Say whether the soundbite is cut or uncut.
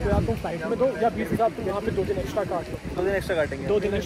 uncut